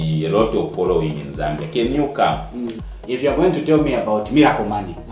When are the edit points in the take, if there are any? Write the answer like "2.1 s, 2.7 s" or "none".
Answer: 2.8 s